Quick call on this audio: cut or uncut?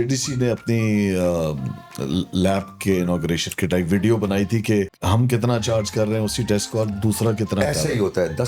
uncut